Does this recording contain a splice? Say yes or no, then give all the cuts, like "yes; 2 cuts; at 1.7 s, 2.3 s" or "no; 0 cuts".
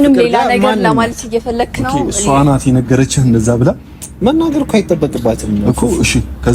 yes; 1 cut; at 5.5 s